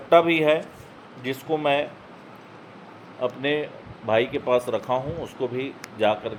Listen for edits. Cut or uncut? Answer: uncut